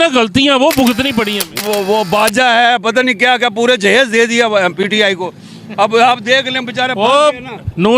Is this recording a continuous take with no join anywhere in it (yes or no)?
no